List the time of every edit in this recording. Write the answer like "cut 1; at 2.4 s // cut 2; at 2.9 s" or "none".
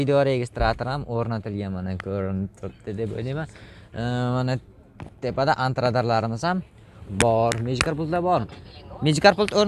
none

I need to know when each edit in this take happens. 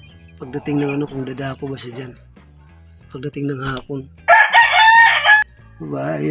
cut 1; at 5.4 s

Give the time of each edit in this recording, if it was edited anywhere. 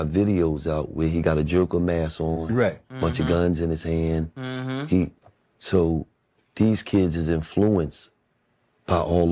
none

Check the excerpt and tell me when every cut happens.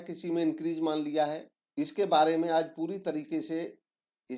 cut 1; at 1.6 s

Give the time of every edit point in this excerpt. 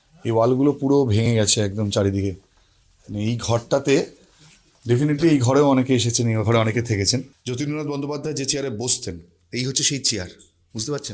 cut 1; at 7.4 s

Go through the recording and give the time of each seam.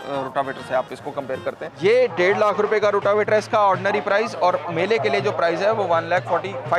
cut 1; at 1.7 s

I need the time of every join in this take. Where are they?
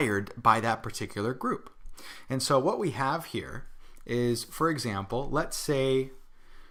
none

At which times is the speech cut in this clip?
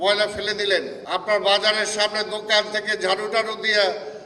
cut 1; at 1.0 s

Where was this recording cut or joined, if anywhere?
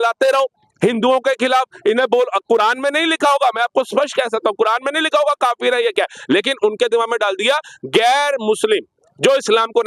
none

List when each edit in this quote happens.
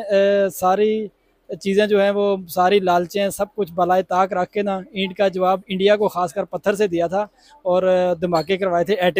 none

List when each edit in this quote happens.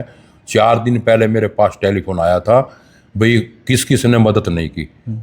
none

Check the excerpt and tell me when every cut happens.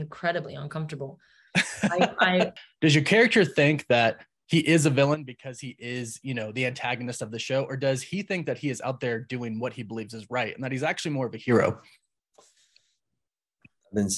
cut 1; at 2.5 s

